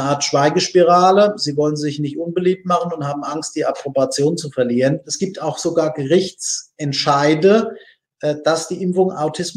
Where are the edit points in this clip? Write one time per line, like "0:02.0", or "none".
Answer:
0:05.1